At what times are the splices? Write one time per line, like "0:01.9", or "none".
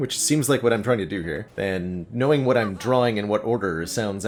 none

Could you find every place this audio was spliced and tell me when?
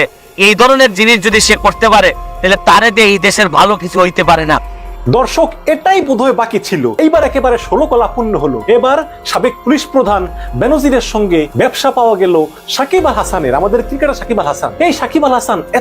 0:04.8
0:06.9
0:08.6
0:11.5
0:14.7

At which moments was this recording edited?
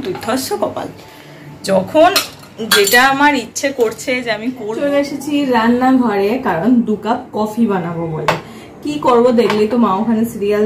0:04.6

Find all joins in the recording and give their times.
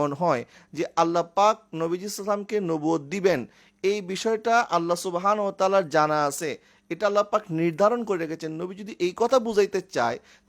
none

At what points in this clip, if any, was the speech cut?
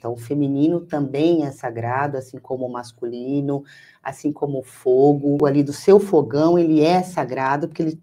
0:05.4

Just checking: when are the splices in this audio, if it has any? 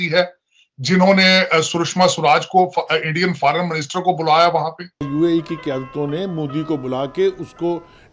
0:05.1

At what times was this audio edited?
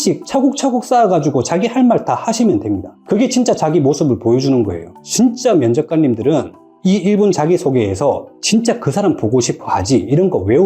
0:05.0

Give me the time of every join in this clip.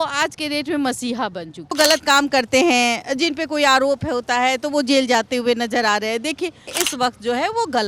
0:01.7
0:06.8

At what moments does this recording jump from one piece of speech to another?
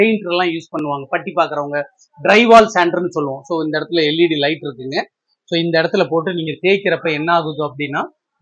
none

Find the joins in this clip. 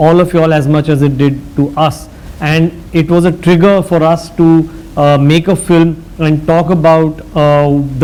none

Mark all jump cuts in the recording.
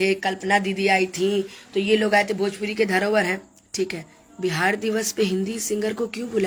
none

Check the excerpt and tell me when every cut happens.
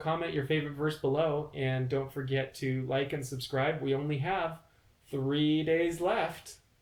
none

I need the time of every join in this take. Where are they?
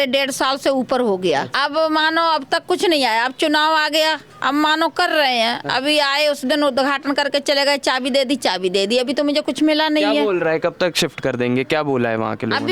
none

